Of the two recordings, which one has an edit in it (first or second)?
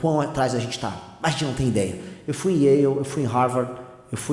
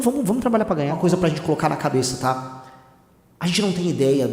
second